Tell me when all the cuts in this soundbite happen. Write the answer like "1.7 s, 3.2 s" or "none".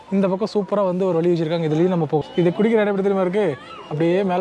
2.2 s